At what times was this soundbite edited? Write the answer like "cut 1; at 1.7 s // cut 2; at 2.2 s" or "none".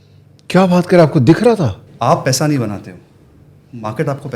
cut 1; at 1.8 s

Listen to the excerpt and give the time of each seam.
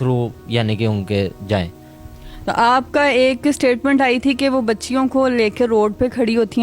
none

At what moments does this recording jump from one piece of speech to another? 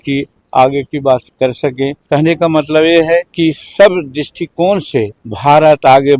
cut 1; at 2.0 s // cut 2; at 3.3 s // cut 3; at 5.2 s

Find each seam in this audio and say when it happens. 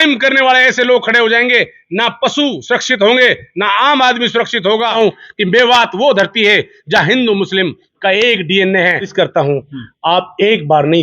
cut 1; at 4.9 s // cut 2; at 9.1 s

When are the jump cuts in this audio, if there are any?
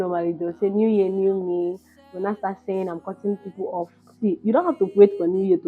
none

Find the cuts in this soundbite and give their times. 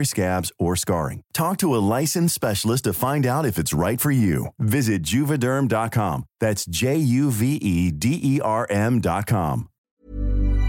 cut 1; at 9.8 s

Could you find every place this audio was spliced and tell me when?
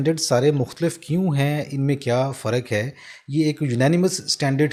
none

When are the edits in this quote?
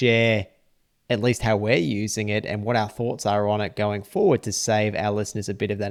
none

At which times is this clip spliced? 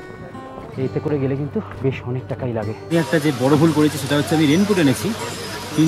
cut 1; at 2.9 s

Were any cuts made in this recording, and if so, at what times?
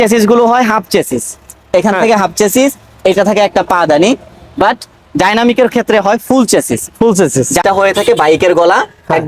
cut 1; at 7.6 s

